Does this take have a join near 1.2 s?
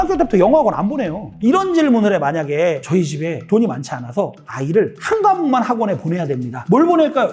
yes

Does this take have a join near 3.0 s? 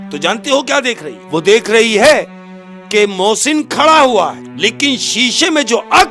no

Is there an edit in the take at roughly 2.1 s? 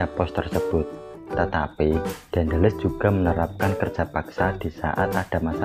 no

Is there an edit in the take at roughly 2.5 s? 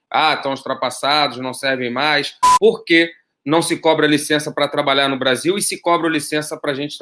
yes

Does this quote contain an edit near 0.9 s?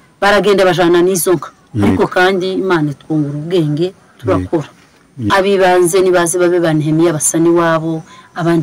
no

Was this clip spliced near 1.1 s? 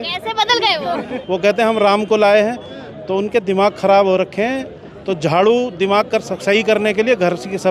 yes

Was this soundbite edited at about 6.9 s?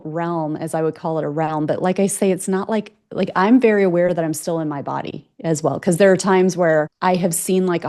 yes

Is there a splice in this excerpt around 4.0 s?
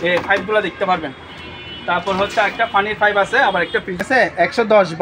yes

